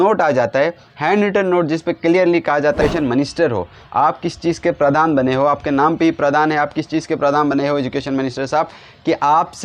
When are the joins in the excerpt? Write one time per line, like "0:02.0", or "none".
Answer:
0:02.8